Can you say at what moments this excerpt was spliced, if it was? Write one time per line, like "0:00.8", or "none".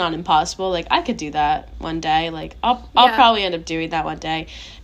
none